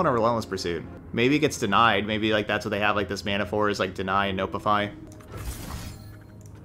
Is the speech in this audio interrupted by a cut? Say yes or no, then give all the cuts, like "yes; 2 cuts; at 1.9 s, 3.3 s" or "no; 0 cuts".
yes; 2 cuts; at 0.9 s, 5.1 s